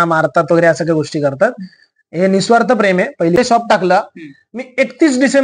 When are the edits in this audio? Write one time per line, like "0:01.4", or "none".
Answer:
0:03.4